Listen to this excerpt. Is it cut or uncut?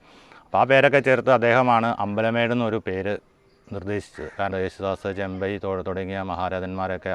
cut